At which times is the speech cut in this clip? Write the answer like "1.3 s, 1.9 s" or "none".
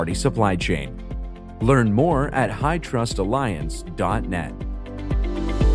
4.8 s